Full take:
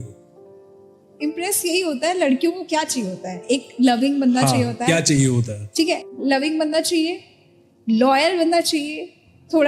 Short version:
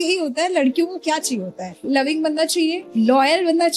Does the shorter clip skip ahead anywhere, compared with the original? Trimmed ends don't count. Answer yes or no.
yes